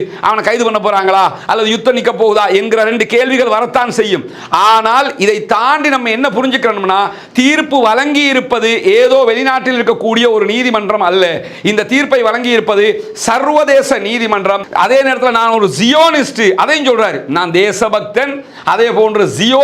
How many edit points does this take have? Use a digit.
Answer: 1